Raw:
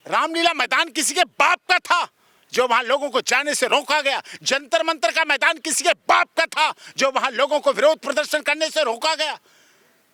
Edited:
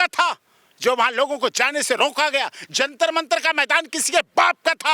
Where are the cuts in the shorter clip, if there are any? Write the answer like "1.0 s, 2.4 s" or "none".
none